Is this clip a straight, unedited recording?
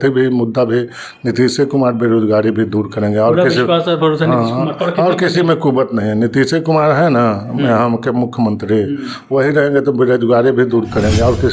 yes; 0 cuts

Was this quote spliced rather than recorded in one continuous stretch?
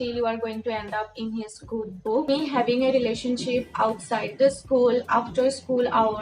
yes; 1 cut; at 2.2 s

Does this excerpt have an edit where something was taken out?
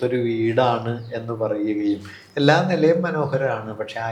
no; 0 cuts

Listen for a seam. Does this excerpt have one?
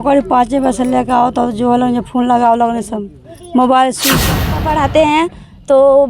yes; 1 cut; at 4.5 s

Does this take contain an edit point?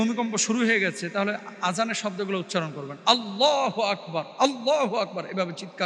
no; 0 cuts

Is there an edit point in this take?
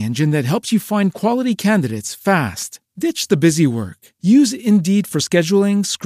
no; 0 cuts

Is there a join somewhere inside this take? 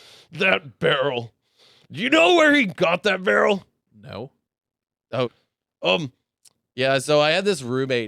yes; 1 cut; at 5.4 s

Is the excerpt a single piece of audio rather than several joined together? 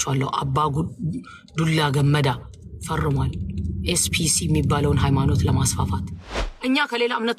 no; 1 cut; at 6.1 s

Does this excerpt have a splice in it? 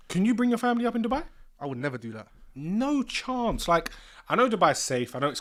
no; 0 cuts

